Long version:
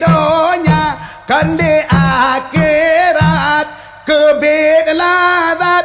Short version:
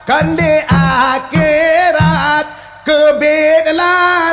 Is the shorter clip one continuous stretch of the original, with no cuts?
yes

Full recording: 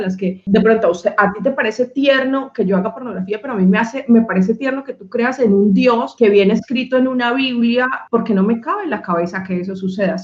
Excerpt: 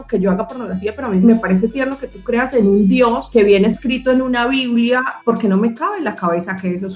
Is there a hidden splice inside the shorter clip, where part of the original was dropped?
yes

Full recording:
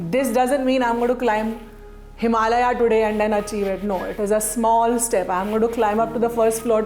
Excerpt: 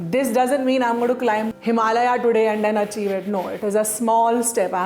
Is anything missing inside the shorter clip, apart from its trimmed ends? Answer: yes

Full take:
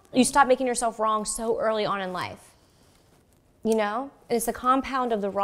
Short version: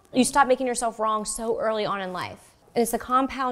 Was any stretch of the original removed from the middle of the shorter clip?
yes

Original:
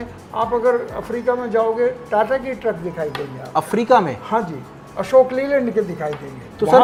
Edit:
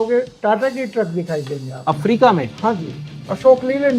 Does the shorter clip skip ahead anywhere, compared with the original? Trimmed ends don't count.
no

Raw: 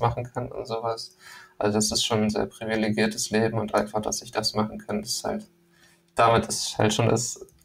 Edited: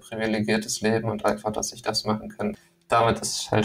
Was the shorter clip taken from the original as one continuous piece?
no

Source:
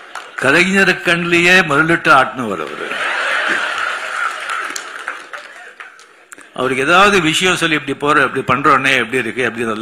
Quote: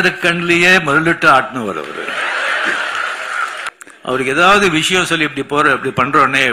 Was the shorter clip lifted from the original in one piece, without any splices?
no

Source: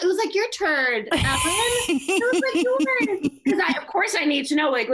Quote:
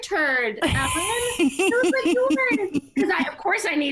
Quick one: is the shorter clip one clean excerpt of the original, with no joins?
yes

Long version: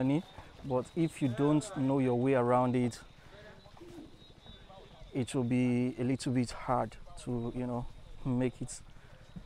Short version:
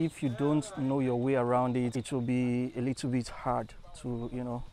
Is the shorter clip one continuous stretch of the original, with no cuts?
no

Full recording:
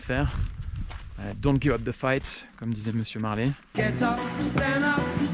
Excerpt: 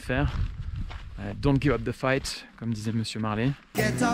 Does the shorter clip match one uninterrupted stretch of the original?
yes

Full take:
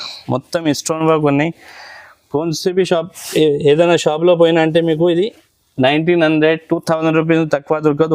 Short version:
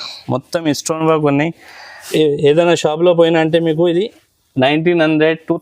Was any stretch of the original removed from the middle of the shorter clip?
yes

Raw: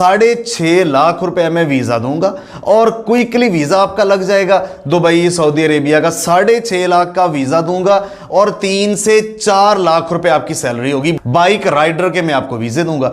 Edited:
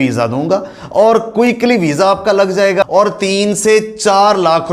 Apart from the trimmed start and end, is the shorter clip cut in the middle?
yes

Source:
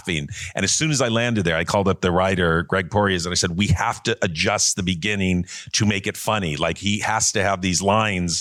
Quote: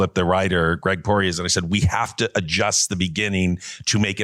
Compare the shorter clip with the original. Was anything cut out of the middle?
no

